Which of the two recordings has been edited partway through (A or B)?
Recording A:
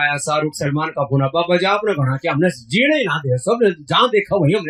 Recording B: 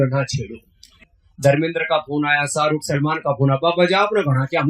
B